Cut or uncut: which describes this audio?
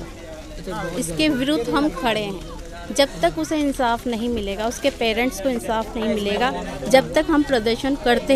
uncut